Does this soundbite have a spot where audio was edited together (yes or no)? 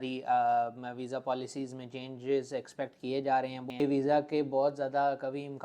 yes